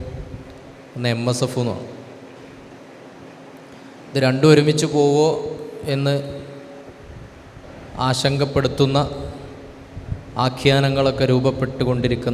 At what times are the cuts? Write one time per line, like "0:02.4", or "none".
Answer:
none